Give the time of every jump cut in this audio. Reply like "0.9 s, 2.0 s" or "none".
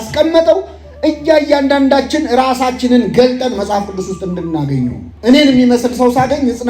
5.1 s